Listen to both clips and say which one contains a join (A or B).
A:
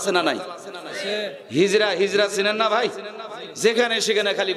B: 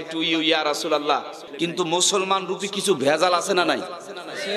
B